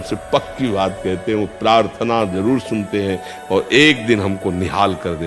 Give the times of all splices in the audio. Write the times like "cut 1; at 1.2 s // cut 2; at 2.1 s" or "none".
none